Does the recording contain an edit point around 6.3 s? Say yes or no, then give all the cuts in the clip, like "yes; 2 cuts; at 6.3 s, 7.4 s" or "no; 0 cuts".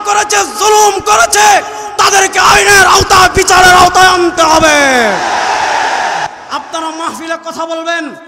yes; 1 cut; at 6.3 s